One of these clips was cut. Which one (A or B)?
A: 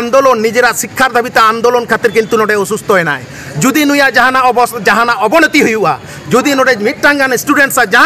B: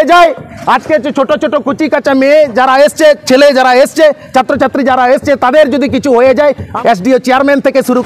B